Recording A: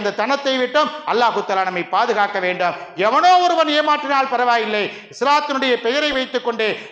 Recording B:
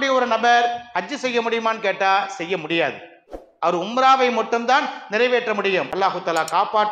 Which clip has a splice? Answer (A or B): B